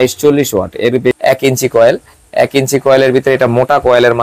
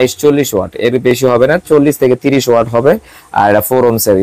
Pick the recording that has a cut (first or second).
first